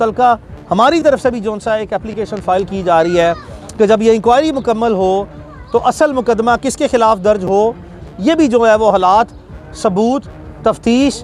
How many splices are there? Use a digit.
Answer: 0